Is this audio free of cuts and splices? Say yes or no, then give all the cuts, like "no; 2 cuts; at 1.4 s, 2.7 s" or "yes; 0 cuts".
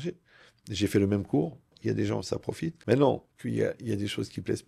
no; 3 cuts; at 1.8 s, 2.8 s, 3.3 s